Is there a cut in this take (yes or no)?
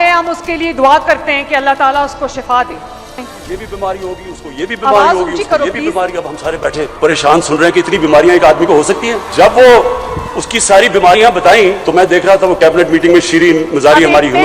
yes